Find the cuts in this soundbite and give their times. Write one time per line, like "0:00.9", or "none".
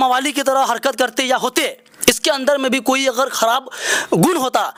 none